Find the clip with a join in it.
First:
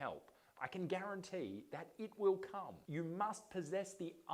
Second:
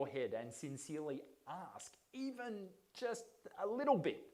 first; 1 cut; at 2.7 s

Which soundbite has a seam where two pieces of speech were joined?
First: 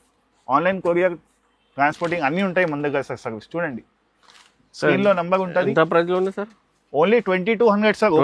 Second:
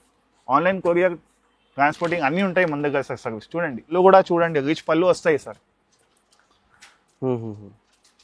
second; 1 cut; at 3.9 s

